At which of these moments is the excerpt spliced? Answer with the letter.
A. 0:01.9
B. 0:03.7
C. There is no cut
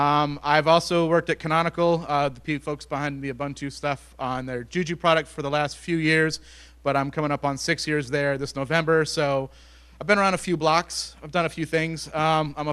C